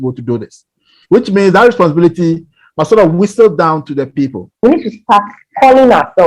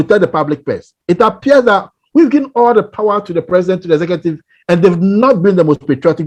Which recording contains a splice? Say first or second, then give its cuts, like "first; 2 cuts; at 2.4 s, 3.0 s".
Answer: first; 1 cut; at 4.6 s